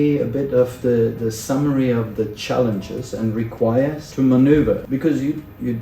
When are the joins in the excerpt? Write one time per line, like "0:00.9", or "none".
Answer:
0:04.0
0:04.8